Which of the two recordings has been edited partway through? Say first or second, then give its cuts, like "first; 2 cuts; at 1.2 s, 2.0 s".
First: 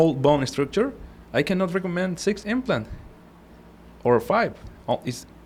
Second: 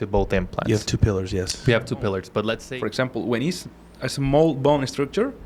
second; 1 cut; at 2.6 s